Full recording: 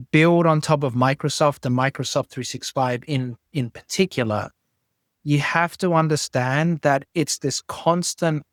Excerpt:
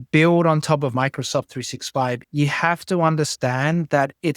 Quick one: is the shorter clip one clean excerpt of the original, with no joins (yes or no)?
no